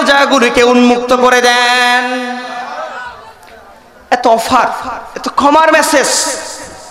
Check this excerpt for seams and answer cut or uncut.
cut